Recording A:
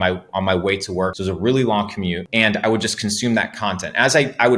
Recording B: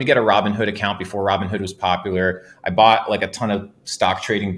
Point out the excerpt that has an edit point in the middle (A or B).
A